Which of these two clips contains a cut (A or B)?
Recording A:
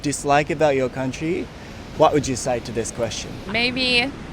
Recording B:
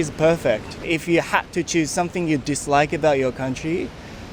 A